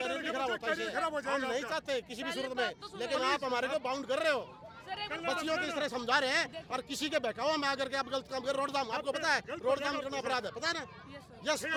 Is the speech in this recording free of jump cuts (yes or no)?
yes